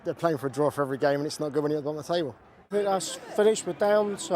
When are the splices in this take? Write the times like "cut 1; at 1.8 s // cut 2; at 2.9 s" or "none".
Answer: cut 1; at 2.4 s